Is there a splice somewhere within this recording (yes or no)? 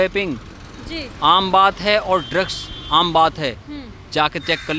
no